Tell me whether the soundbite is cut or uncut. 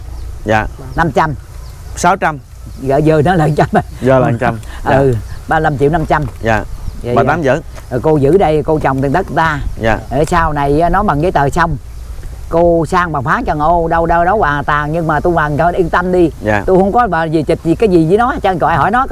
uncut